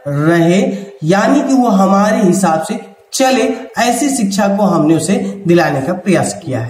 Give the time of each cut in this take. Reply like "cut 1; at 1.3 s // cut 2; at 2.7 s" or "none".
none